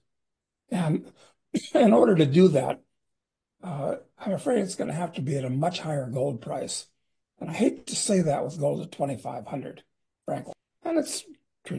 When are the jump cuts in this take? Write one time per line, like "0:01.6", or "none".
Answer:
0:10.5